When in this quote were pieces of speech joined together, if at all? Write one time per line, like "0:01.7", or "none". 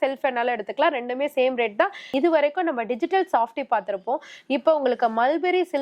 0:02.0